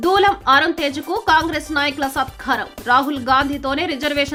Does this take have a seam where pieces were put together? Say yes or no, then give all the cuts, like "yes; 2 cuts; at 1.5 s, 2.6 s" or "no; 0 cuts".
no; 0 cuts